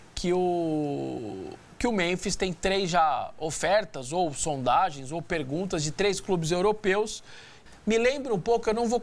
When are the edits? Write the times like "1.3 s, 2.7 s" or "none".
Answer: 7.5 s